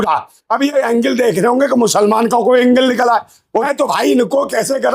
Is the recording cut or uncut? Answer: cut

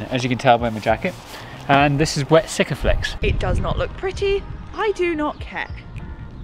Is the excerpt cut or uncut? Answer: cut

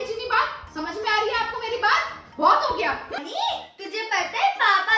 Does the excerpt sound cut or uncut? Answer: cut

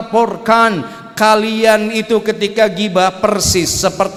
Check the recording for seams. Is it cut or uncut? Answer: uncut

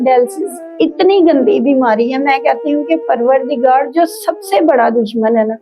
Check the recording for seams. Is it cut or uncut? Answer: uncut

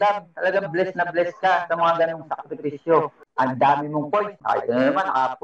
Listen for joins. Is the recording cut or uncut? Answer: cut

